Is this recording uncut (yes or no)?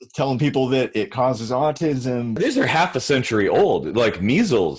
no